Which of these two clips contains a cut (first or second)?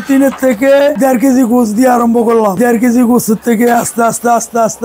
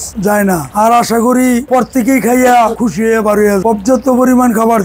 first